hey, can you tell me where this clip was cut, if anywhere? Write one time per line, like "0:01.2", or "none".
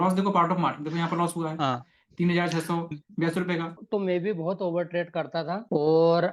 0:03.8